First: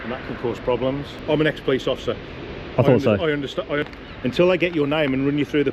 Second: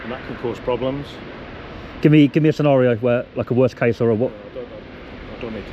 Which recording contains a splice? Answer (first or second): first